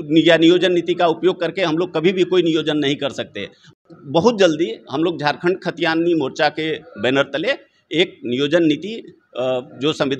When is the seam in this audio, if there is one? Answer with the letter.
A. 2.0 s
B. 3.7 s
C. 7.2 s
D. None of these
B